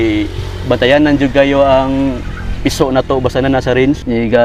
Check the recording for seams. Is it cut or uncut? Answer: uncut